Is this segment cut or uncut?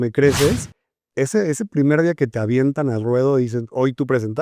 uncut